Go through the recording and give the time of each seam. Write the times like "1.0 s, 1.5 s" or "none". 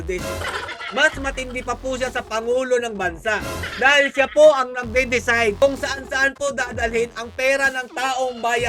none